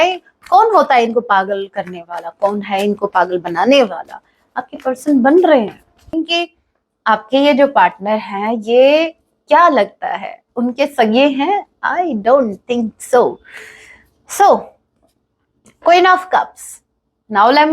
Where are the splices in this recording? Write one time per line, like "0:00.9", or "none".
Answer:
0:06.1